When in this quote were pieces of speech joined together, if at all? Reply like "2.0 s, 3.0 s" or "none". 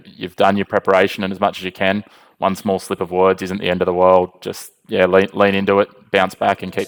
none